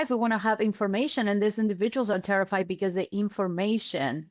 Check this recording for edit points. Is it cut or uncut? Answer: uncut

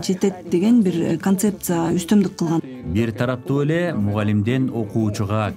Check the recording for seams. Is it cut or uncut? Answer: cut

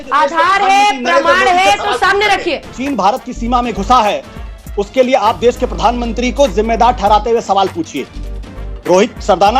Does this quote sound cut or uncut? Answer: cut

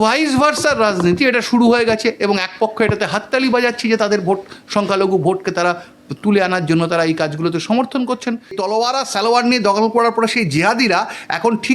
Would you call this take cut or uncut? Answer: cut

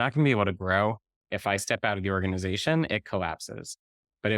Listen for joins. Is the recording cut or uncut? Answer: cut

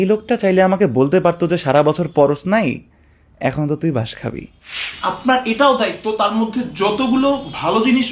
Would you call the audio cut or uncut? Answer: cut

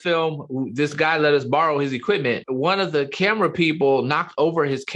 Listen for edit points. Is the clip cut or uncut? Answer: cut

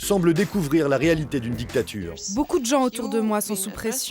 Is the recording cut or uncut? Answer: cut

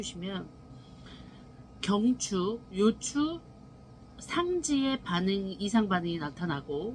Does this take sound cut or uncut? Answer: uncut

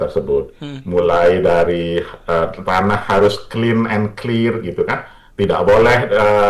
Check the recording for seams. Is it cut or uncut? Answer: uncut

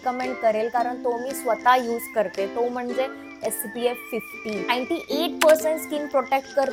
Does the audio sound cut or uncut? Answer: uncut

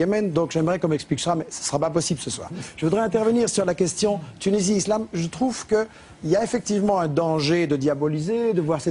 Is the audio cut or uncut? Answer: cut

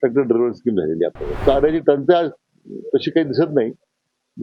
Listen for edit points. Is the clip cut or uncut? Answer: cut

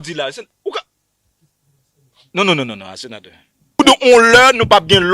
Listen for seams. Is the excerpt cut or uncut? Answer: cut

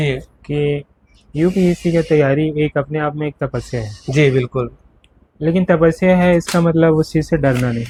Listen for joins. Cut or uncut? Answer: uncut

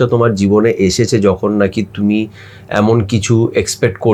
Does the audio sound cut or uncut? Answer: uncut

